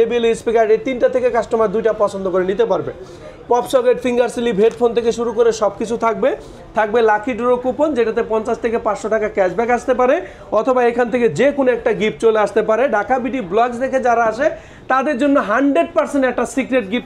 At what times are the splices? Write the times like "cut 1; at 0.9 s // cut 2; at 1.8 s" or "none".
none